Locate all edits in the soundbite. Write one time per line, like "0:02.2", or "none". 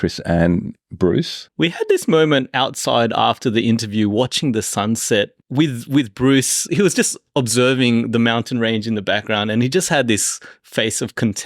0:01.4
0:05.4
0:06.6